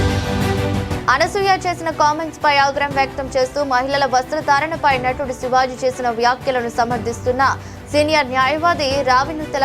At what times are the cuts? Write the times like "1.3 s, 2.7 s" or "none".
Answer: 1.0 s